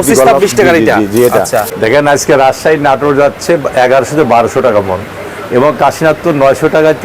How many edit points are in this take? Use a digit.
1